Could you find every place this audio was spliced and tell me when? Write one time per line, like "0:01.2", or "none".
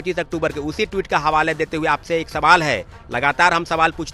none